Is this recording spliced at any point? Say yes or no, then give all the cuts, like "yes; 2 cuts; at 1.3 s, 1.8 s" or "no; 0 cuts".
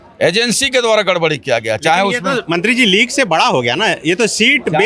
no; 0 cuts